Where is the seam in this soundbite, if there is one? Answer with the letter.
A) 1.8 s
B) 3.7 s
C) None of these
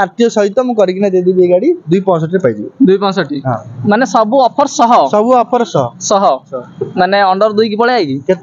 B